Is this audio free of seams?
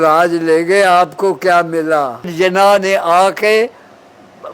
no; 1 cut; at 2.3 s

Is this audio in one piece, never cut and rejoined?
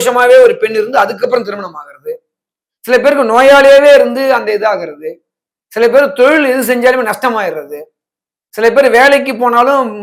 yes; 0 cuts

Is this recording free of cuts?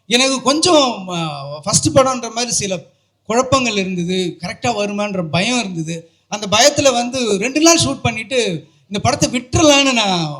yes; 0 cuts

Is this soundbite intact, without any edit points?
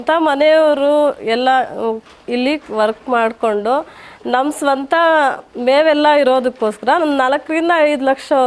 yes; 0 cuts

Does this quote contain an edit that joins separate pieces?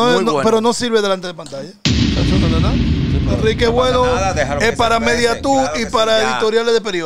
no; 0 cuts

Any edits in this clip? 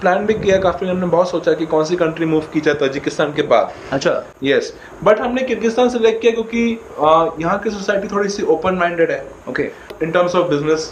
no; 0 cuts

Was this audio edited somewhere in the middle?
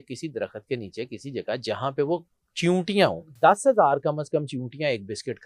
yes; 1 cut; at 3.4 s

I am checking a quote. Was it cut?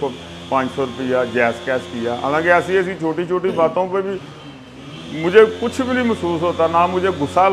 no; 0 cuts

